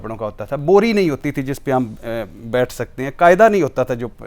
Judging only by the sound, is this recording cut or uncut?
uncut